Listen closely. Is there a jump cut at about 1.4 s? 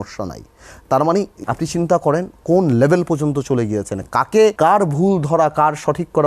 yes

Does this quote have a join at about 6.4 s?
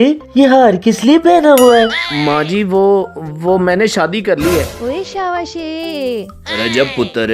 no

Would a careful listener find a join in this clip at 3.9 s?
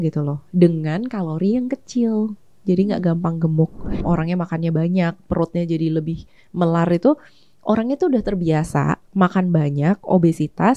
yes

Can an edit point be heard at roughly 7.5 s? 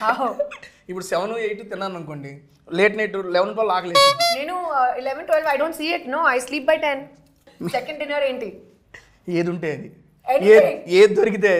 yes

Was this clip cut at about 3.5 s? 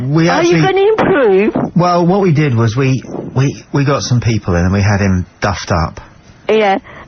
no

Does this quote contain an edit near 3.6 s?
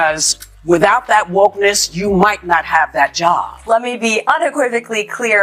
yes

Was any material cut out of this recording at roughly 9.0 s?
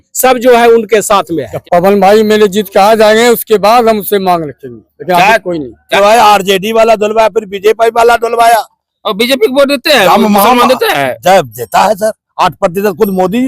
no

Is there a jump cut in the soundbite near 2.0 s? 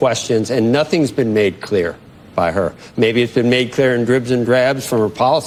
no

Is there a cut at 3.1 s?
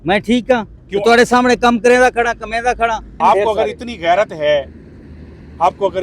yes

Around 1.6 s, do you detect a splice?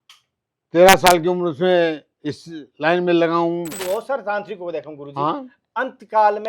no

